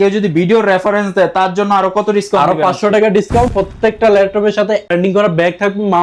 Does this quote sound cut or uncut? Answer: cut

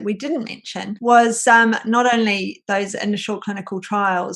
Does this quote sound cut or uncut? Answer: uncut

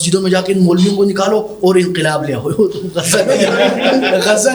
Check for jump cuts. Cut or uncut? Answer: uncut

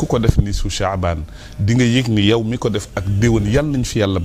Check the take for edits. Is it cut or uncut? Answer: uncut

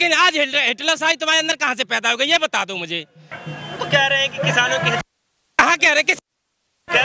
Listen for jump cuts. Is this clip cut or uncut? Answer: uncut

